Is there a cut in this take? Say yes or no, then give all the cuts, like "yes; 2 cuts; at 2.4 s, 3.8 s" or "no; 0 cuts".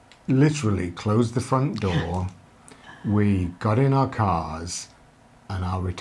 no; 0 cuts